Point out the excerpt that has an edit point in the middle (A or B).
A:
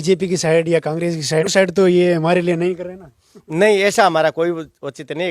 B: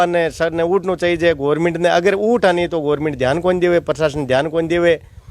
A